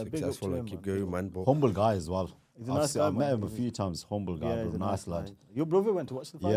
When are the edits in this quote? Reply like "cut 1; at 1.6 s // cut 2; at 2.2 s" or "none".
none